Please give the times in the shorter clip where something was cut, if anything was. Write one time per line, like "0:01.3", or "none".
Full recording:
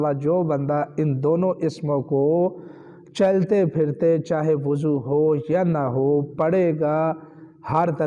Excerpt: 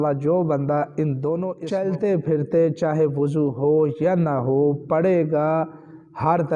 0:01.6